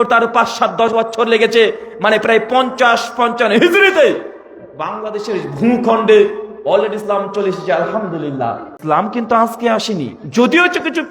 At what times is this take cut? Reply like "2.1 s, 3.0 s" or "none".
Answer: 8.7 s